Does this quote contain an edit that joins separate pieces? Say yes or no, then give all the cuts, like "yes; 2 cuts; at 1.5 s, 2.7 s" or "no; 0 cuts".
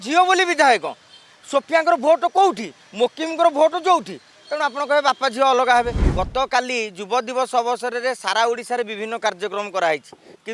yes; 1 cut; at 6.0 s